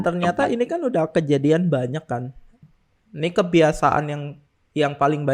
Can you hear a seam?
yes; 1 cut; at 2.6 s

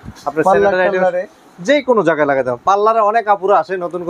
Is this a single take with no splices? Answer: yes; 0 cuts

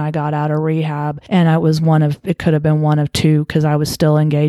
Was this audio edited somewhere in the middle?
yes; 1 cut; at 1.2 s

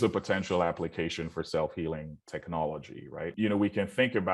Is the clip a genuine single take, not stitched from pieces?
no; 1 cut; at 3.3 s

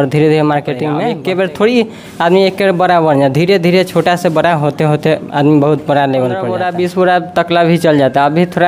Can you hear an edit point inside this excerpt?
yes; 2 cuts; at 1.0 s, 6.5 s

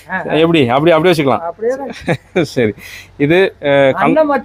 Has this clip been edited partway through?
no; 0 cuts

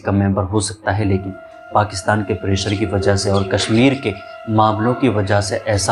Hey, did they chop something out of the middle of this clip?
no; 0 cuts

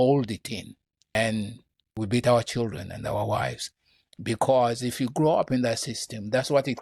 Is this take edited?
yes; 2 cuts; at 1.1 s, 1.9 s

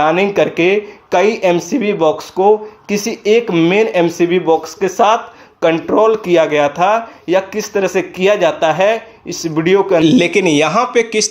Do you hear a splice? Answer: yes; 1 cut; at 10.0 s

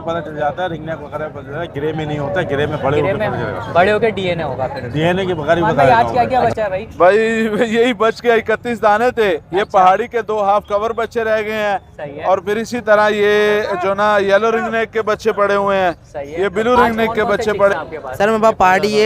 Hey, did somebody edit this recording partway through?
yes; 2 cuts; at 5.9 s, 17.7 s

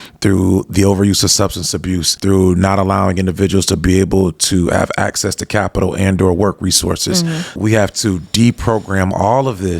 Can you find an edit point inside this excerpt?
yes; 2 cuts; at 2.1 s, 7.6 s

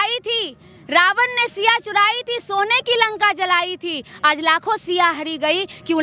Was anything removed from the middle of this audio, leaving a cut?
no; 0 cuts

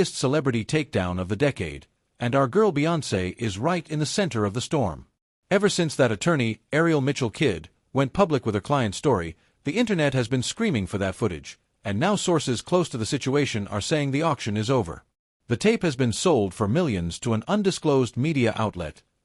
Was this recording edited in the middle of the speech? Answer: no; 0 cuts

